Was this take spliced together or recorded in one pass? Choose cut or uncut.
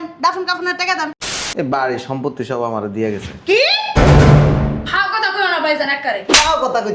cut